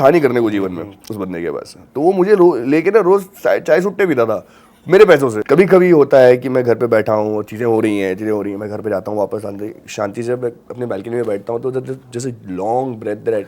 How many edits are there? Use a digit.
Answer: 1